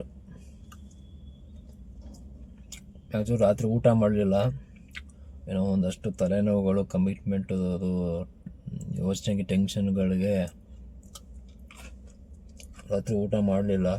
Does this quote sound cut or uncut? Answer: uncut